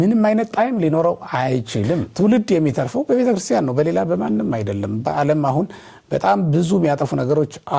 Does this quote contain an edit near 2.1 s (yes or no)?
yes